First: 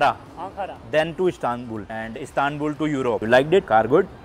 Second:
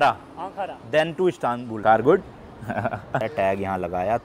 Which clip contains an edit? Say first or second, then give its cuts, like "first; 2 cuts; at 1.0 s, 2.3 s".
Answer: second; 2 cuts; at 1.8 s, 3.2 s